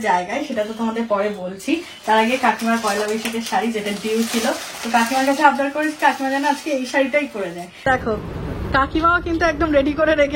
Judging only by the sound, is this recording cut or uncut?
cut